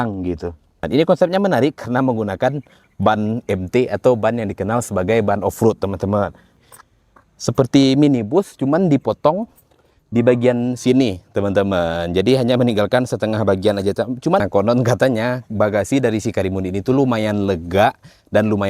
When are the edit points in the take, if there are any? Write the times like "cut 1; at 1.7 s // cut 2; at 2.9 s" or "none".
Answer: cut 1; at 0.8 s // cut 2; at 6.6 s // cut 3; at 14.4 s